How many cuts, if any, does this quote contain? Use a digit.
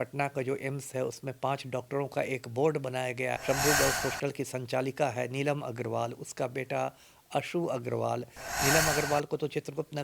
1